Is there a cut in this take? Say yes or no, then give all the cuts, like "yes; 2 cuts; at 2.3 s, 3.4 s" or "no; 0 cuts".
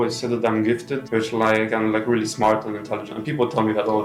no; 0 cuts